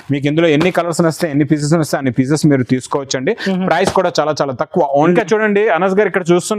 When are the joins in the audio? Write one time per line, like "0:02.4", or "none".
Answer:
0:05.1